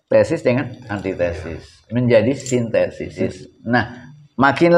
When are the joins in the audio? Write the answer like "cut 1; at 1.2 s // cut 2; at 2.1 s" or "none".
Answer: cut 1; at 3.2 s

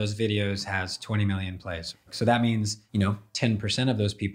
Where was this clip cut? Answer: cut 1; at 2.0 s // cut 2; at 2.8 s

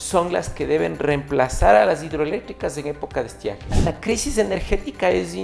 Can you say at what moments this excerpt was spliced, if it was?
cut 1; at 3.8 s

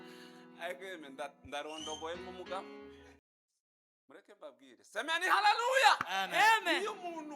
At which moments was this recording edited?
cut 1; at 3.1 s

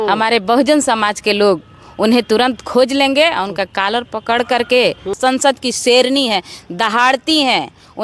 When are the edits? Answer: cut 1; at 5.1 s

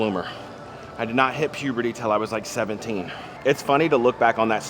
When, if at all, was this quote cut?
cut 1; at 3.2 s

